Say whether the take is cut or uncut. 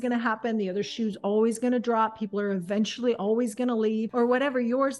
cut